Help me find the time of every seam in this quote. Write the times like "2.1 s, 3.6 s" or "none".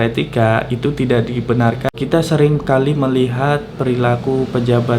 1.9 s